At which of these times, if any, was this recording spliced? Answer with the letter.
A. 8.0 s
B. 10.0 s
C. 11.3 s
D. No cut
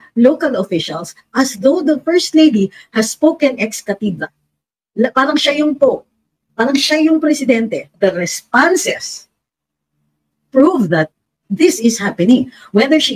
A